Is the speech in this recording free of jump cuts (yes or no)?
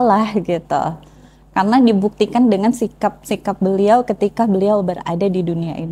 yes